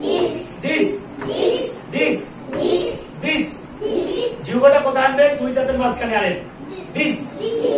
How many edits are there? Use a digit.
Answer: 0